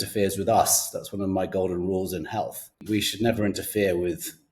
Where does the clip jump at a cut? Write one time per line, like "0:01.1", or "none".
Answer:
0:02.8